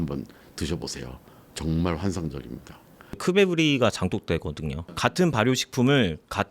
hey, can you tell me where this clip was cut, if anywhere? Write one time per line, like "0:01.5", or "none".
0:03.2

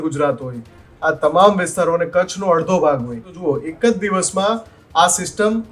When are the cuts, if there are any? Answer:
0:03.3

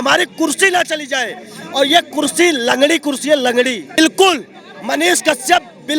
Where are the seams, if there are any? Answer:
0:04.0

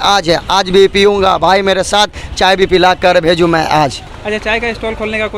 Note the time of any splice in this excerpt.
0:04.1

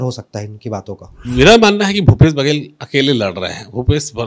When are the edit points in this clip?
0:01.1

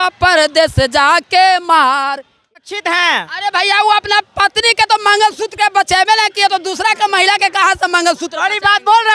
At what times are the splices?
0:02.6

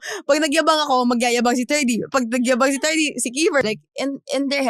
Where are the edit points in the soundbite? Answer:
0:03.6

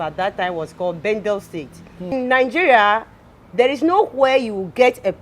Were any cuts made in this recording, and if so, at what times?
0:02.1

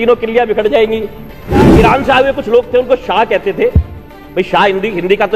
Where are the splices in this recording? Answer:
0:01.7

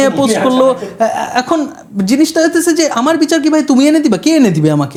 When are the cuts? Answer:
none

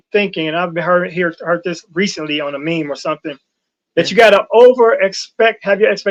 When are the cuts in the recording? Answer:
none

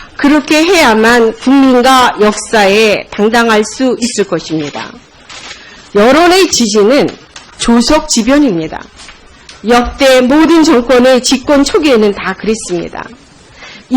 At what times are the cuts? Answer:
0:03.1

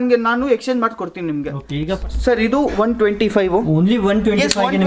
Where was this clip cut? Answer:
0:02.0

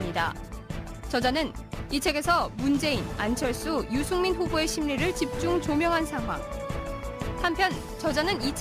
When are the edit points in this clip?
none

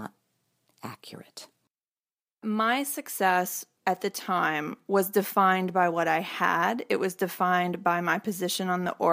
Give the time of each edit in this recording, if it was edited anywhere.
0:02.4
0:03.6

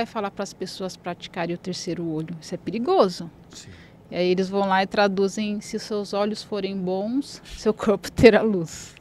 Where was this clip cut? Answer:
none

